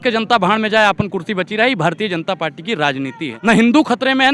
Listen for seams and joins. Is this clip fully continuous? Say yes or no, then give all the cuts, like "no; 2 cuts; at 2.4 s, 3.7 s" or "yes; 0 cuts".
no; 1 cut; at 3.3 s